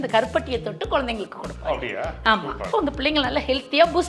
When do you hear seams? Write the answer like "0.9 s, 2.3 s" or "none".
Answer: 2.7 s